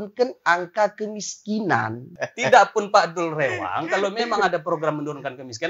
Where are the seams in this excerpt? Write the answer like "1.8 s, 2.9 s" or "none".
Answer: 2.2 s